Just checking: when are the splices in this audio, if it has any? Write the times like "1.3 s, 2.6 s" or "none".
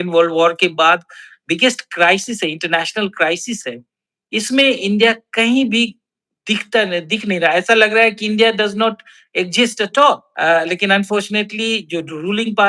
10.3 s